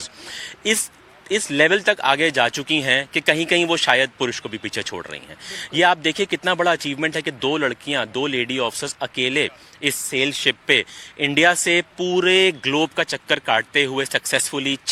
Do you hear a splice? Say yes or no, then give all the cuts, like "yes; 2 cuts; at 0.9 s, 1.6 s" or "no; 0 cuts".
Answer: no; 0 cuts